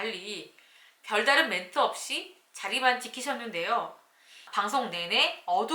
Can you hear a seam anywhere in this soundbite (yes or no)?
yes